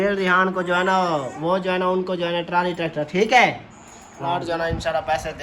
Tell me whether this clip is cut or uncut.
cut